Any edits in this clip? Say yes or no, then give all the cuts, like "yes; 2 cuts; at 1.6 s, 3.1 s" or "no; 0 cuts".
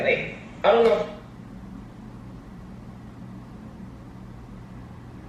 no; 0 cuts